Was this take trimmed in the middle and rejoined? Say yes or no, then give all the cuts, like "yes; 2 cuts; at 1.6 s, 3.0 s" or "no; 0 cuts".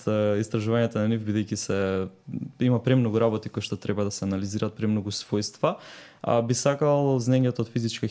no; 0 cuts